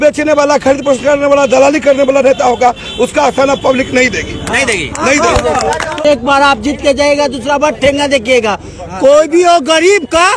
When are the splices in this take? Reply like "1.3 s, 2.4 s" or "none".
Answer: 6.0 s